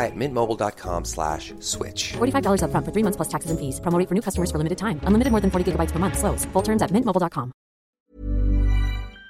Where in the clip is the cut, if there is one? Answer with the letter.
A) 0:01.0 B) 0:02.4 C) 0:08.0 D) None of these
C